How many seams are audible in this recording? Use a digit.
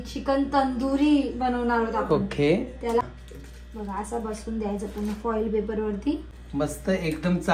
2